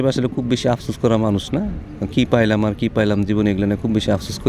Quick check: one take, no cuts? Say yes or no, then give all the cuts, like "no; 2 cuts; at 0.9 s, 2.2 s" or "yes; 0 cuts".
yes; 0 cuts